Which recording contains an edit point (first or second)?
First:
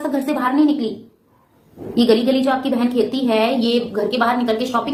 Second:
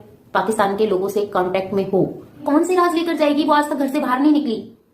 second